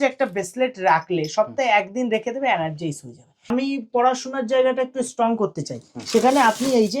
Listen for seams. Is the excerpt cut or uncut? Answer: cut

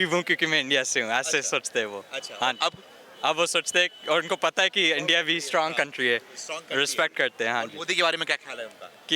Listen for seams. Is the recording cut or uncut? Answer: uncut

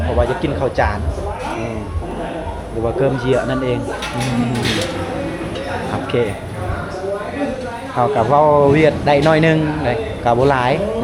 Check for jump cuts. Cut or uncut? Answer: uncut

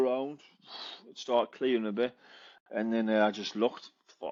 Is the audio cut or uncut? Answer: uncut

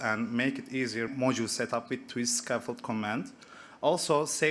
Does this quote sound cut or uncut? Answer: cut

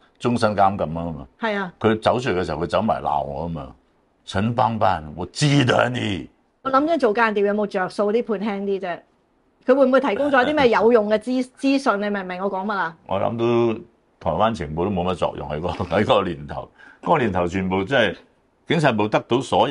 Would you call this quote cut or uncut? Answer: cut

